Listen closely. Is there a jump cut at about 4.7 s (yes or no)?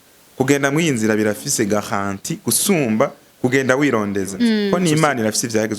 yes